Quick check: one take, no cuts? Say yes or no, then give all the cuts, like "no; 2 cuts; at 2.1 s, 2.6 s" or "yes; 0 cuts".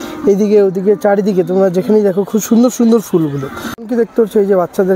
no; 1 cut; at 3.7 s